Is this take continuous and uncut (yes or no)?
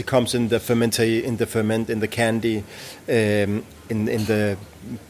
yes